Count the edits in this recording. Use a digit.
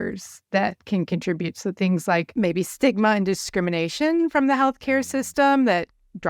1